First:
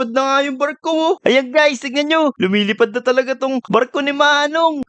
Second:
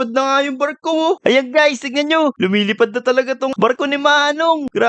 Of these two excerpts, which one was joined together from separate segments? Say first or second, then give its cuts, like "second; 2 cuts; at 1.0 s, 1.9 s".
second; 1 cut; at 3.7 s